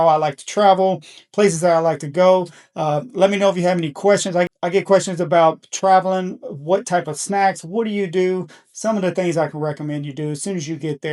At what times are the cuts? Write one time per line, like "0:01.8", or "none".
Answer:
none